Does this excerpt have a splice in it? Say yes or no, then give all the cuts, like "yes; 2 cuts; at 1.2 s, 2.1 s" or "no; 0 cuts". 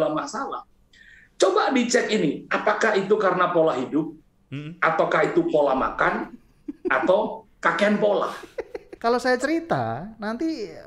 yes; 1 cut; at 8.8 s